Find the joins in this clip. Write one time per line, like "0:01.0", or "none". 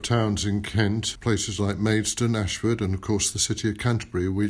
0:01.1